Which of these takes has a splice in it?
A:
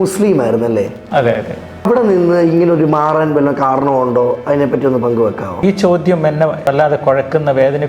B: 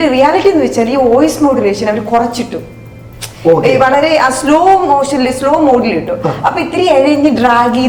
A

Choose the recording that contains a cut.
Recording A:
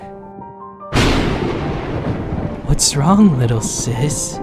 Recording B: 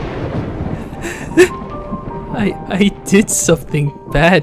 B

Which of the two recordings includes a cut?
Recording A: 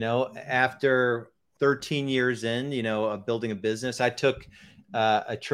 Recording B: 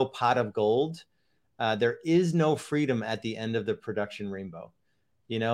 A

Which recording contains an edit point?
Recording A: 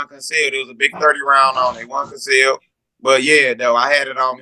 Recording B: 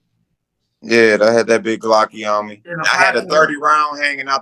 B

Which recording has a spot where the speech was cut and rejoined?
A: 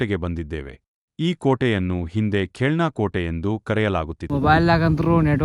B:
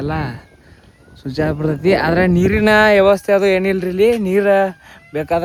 A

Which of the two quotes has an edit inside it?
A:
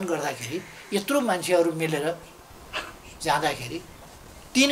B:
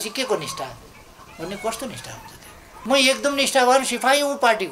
B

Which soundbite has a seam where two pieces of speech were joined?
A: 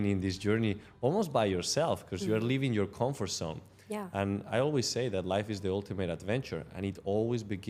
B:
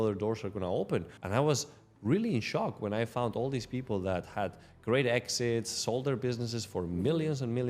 B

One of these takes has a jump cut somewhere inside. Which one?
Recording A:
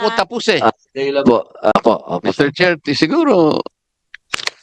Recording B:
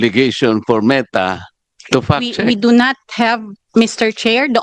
A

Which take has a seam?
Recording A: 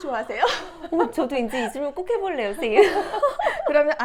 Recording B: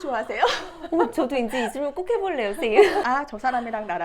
B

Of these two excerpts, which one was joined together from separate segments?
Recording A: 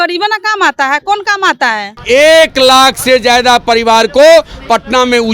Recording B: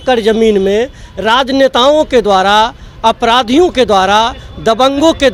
A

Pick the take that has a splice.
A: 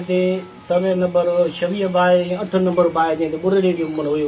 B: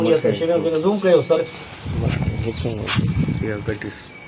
B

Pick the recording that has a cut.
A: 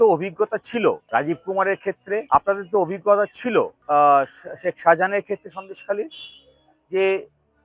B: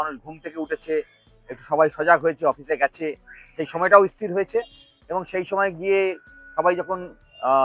A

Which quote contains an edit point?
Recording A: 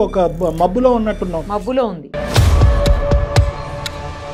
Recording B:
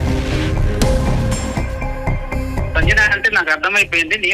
B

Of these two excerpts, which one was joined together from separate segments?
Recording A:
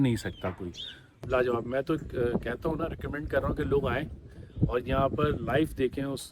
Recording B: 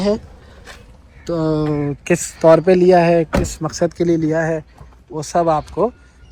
A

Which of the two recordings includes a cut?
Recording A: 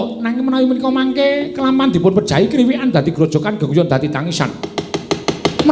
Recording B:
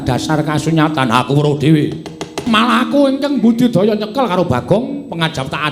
B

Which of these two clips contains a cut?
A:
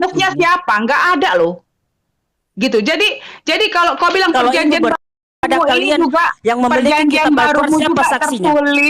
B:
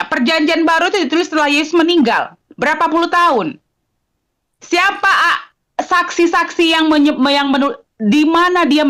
A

